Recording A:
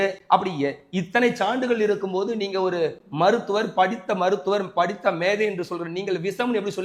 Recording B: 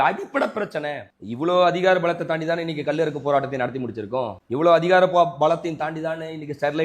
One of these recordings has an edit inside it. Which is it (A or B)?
B